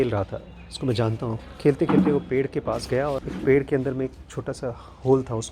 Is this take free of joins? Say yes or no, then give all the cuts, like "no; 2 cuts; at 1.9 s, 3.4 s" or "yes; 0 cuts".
no; 2 cuts; at 1.4 s, 3.3 s